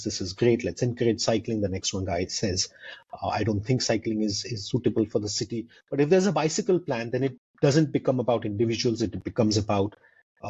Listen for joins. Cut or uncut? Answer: uncut